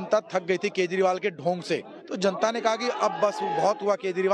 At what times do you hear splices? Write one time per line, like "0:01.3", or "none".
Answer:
0:02.0